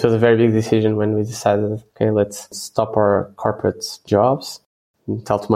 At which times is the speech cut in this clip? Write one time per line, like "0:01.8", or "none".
none

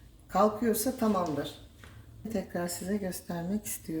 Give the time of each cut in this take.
0:02.3

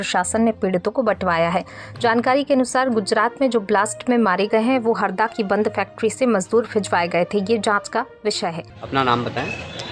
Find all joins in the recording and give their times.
0:08.7

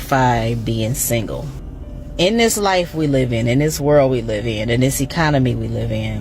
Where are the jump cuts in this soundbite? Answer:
0:01.6

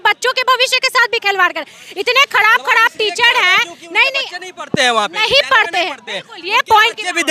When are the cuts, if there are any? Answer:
none

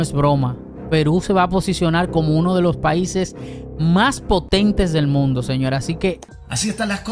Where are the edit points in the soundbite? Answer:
0:06.0

